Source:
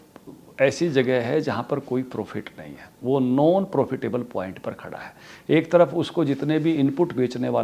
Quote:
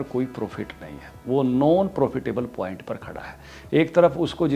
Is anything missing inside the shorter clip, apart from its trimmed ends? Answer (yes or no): no